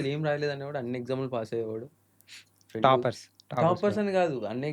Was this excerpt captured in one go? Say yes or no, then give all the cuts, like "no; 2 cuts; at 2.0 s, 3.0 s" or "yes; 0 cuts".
yes; 0 cuts